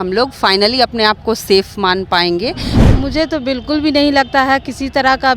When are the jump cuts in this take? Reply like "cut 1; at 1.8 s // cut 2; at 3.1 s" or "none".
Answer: cut 1; at 2.7 s